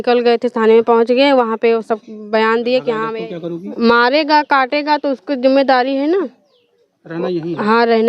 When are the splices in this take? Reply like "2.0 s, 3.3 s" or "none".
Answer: 3.0 s